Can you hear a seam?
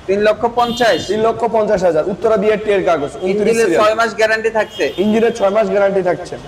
no; 0 cuts

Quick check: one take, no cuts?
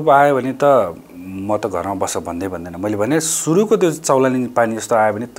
yes; 0 cuts

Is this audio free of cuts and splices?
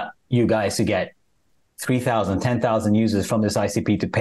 yes; 0 cuts

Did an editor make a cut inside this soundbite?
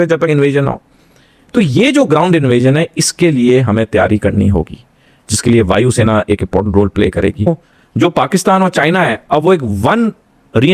yes; 1 cut; at 7.4 s

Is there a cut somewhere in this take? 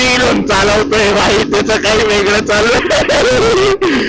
no; 0 cuts

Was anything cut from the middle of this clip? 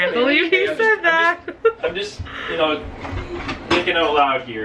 no; 0 cuts

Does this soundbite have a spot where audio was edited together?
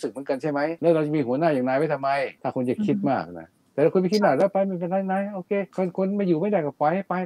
yes; 3 cuts; at 0.8 s, 2.4 s, 5.7 s

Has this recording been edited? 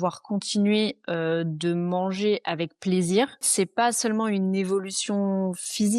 yes; 1 cut; at 3.5 s

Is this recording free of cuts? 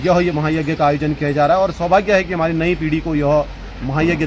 yes; 0 cuts

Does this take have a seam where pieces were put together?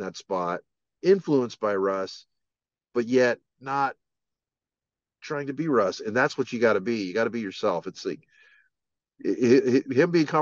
no; 0 cuts

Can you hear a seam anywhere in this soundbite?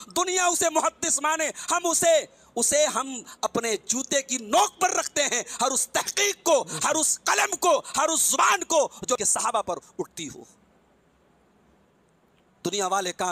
yes; 1 cut; at 9.2 s

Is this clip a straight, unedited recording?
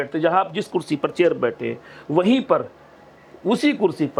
yes; 0 cuts

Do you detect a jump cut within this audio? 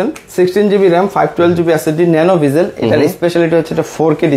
no; 0 cuts

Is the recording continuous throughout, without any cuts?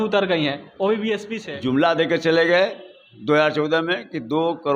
no; 1 cut; at 1.4 s

